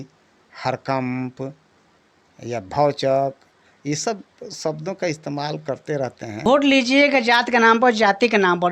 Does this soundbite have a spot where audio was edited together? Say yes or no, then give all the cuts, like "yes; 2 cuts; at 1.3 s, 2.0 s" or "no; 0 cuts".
yes; 1 cut; at 6.4 s